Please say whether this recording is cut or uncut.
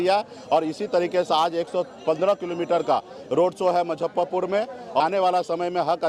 cut